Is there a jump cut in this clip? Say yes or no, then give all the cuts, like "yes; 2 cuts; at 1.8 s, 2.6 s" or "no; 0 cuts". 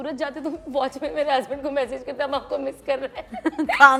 no; 0 cuts